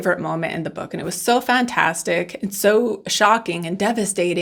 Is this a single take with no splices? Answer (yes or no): yes